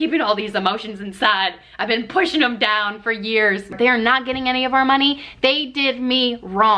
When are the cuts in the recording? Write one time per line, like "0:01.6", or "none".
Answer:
0:03.7